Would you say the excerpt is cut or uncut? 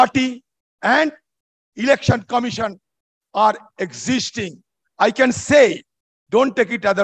uncut